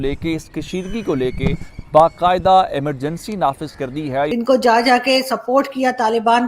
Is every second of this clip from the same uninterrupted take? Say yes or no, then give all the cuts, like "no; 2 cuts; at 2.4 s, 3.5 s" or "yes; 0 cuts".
no; 1 cut; at 4.3 s